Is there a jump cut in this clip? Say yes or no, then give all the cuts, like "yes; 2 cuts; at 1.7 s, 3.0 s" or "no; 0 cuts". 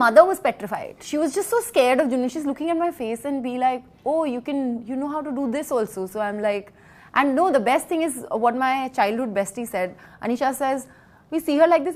no; 0 cuts